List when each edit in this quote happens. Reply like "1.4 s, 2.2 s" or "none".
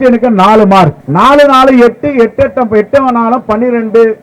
1.0 s